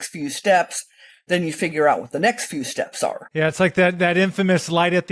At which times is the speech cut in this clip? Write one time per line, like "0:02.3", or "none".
0:03.2